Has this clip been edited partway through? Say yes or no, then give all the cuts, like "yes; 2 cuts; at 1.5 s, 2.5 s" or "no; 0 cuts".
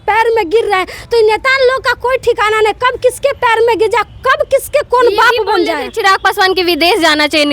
no; 0 cuts